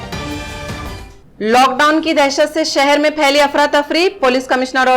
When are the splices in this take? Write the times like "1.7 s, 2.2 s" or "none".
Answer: 1.0 s